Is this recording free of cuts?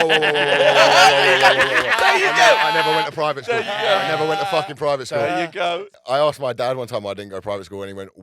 no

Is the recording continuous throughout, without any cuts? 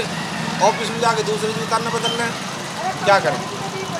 yes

